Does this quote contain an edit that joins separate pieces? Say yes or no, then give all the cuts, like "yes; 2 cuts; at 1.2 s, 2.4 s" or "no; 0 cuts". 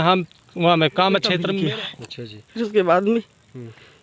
yes; 1 cut; at 1.5 s